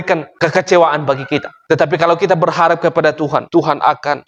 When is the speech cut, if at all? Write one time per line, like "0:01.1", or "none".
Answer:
none

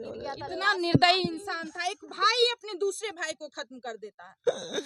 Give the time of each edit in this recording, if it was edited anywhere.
none

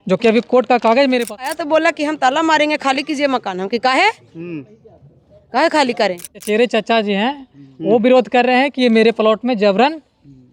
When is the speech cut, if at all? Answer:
0:01.5
0:06.3

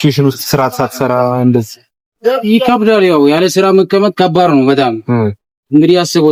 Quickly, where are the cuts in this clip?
none

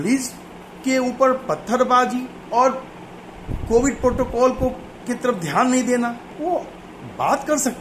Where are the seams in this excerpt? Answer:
0:02.4
0:04.9
0:06.3

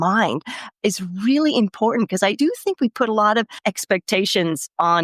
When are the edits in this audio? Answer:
0:02.3
0:03.5

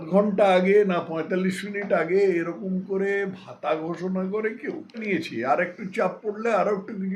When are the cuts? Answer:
0:05.0

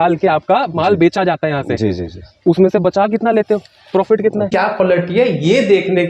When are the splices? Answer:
0:04.5

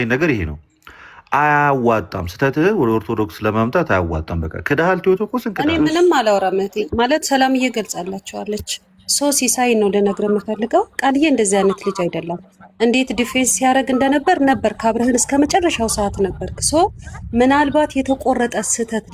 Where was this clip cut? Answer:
0:05.5

